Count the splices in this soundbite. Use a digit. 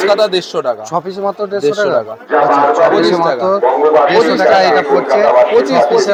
0